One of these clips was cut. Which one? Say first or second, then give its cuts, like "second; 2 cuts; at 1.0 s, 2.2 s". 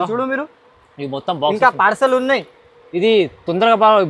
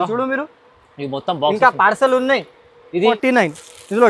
second; 1 cut; at 3.1 s